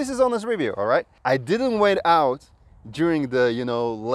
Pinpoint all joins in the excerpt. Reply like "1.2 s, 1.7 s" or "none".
1.1 s